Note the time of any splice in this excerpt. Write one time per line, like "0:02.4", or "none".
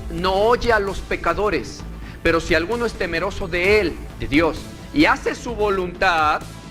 0:04.1